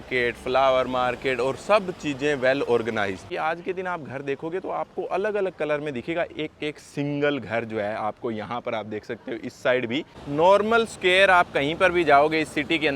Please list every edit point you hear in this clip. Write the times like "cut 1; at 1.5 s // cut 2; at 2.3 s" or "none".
cut 1; at 3.3 s // cut 2; at 10.2 s